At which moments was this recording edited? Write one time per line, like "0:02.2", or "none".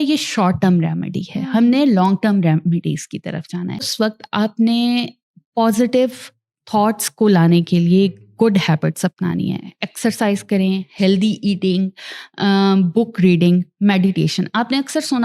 0:03.8